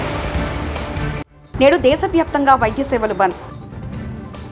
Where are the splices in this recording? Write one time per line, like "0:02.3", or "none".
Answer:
0:01.3

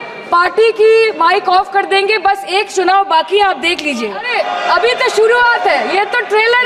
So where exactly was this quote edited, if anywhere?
0:04.3

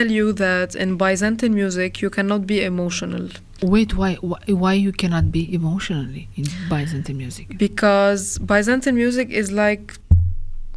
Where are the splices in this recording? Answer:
0:03.5

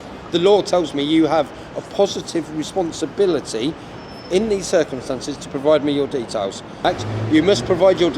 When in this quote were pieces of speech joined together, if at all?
0:06.8

